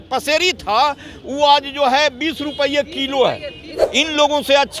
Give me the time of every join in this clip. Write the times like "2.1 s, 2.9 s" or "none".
3.8 s